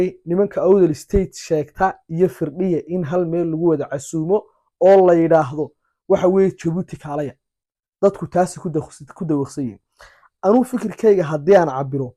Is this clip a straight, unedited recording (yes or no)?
yes